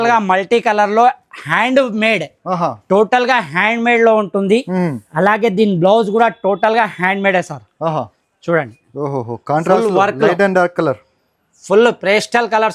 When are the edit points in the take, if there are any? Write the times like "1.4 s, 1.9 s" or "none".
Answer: none